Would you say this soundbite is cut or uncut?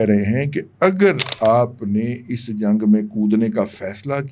uncut